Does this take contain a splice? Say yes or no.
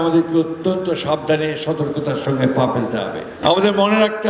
yes